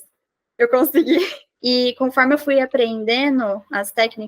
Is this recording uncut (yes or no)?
no